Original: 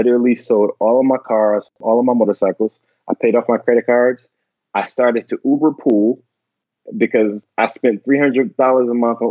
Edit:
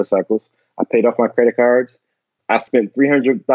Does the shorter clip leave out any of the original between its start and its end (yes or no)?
yes